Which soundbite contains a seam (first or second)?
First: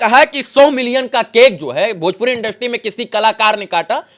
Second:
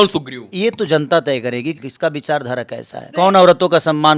second